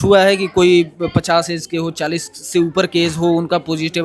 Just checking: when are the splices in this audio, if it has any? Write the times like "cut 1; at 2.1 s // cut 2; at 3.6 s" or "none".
none